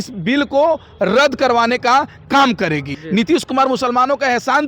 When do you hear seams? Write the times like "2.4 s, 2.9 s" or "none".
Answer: 3.0 s